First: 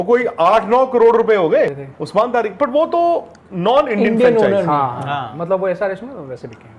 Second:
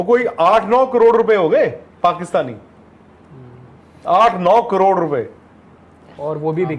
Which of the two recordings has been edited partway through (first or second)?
first